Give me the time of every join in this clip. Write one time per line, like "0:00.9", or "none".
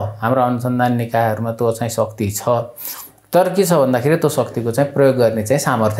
none